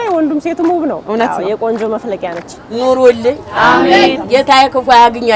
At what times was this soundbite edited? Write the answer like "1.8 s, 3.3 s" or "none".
1.0 s, 2.5 s